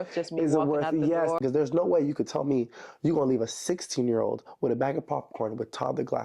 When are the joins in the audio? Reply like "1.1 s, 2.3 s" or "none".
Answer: 1.4 s